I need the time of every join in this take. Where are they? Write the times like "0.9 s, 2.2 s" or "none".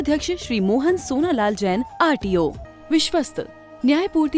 2.7 s